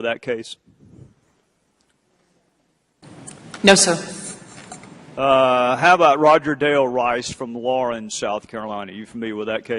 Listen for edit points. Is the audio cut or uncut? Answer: cut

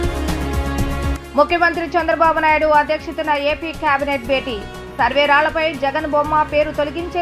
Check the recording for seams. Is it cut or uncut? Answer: cut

